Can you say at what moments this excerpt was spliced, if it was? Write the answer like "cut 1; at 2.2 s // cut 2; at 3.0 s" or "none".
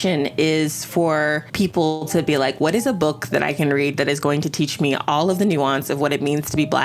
cut 1; at 1.4 s